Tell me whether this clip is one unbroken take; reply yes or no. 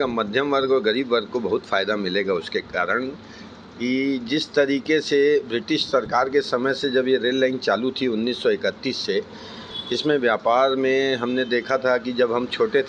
yes